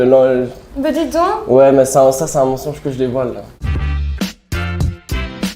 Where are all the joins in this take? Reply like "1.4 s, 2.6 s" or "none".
3.5 s